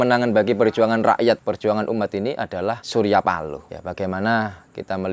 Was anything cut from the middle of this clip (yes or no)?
yes